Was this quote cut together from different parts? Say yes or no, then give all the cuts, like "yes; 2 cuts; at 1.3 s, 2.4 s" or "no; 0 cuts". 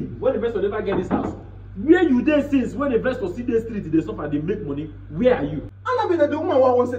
yes; 1 cut; at 5.7 s